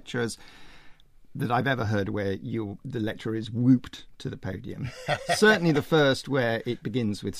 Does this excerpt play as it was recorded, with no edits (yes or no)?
no